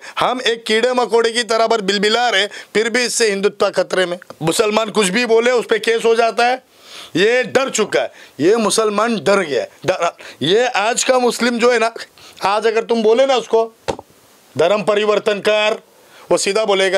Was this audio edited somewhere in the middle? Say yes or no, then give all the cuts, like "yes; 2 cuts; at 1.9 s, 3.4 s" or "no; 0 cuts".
yes; 1 cut; at 4.3 s